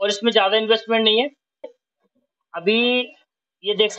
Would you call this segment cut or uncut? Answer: cut